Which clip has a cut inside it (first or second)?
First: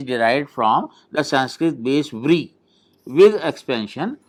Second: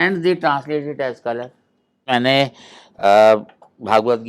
second